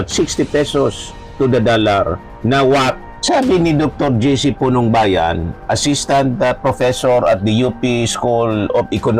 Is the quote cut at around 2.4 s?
no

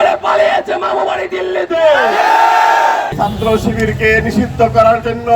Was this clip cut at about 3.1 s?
yes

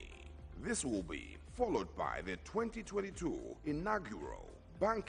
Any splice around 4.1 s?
no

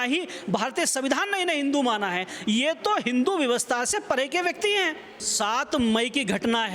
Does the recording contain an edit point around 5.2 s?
yes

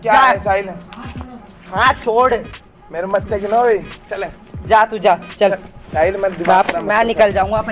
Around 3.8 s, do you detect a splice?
no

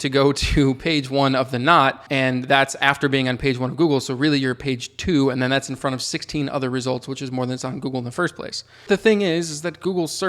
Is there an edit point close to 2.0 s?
yes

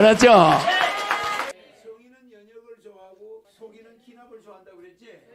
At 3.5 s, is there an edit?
yes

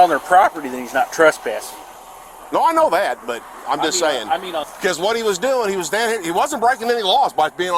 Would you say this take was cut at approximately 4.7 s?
yes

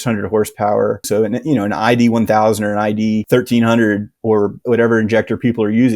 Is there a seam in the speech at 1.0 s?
yes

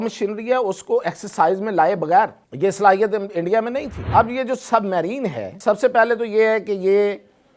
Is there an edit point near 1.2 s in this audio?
no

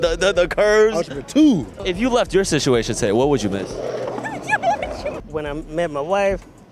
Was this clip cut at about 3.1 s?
no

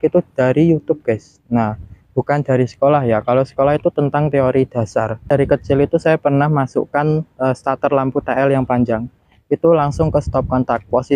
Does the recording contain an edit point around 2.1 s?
no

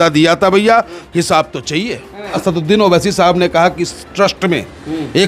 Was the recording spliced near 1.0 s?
no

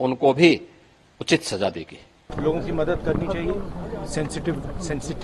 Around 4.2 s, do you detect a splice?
no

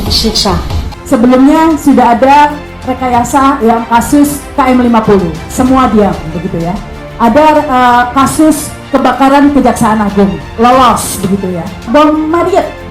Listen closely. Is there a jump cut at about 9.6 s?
no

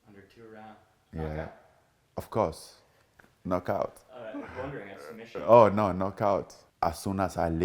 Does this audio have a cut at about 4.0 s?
no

